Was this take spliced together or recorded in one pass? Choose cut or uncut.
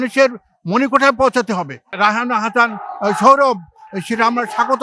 cut